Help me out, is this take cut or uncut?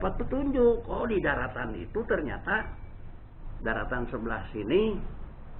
uncut